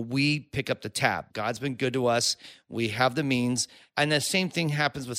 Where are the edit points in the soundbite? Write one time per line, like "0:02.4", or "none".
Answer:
0:01.3
0:03.8